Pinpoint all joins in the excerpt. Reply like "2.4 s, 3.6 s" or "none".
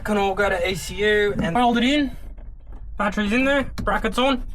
1.5 s